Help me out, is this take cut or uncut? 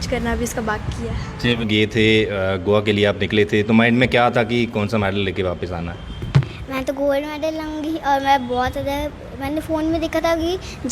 cut